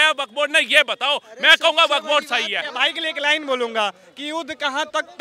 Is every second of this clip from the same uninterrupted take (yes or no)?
no